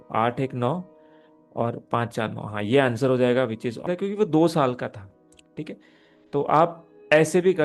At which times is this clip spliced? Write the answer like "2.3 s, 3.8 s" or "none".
3.9 s